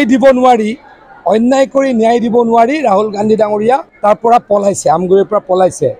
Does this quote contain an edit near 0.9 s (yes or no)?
no